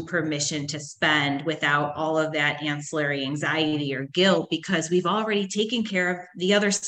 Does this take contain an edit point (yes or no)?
no